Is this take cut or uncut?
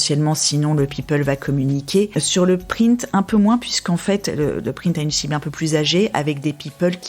cut